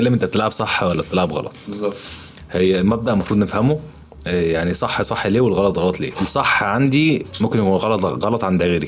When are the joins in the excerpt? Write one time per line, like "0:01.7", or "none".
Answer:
none